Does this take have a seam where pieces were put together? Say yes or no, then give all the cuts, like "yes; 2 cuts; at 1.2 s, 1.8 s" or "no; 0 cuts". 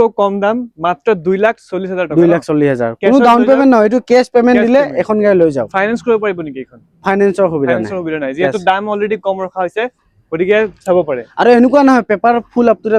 no; 0 cuts